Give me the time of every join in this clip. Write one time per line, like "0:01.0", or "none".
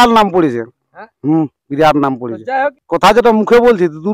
0:02.8